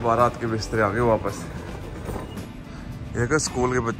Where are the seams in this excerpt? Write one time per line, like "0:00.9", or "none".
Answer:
0:02.5